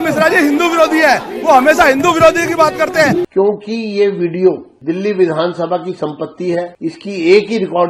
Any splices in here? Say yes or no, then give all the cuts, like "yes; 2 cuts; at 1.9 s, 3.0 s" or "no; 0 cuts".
yes; 3 cuts; at 3.3 s, 4.7 s, 6.7 s